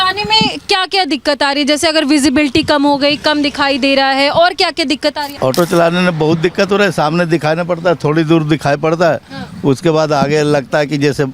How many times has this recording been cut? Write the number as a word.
one